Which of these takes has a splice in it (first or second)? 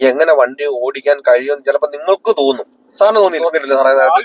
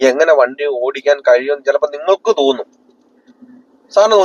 first